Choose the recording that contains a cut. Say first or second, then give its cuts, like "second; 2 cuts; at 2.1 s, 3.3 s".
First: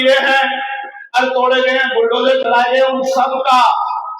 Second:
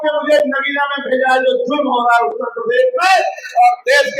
first; 1 cut; at 1.2 s